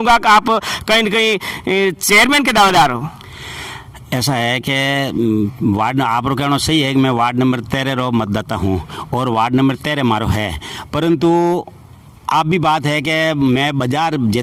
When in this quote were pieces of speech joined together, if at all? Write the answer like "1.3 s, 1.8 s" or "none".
none